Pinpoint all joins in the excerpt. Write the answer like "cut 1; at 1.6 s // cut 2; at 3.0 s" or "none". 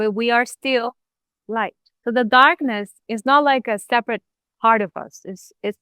cut 1; at 1.8 s // cut 2; at 3.0 s